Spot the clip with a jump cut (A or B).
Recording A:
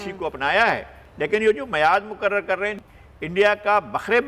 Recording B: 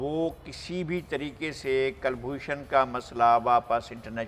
A